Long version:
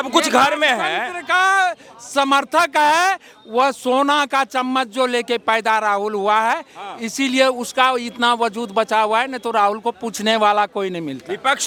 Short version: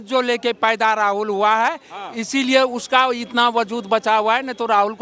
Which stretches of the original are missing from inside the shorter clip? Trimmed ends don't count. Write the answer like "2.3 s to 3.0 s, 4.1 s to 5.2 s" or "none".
none